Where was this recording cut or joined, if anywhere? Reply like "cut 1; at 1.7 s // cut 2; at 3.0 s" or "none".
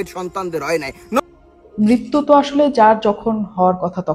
cut 1; at 1.2 s